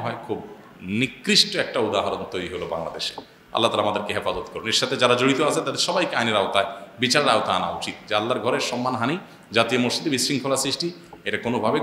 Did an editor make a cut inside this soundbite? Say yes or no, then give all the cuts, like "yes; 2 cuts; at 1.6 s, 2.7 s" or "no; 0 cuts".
no; 0 cuts